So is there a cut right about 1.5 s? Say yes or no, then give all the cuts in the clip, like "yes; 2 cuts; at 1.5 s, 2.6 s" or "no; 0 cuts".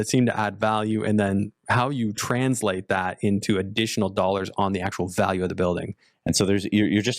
no; 1 cut; at 6.1 s